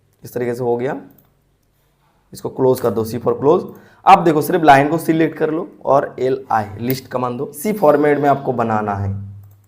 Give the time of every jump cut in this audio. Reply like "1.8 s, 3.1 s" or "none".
7.5 s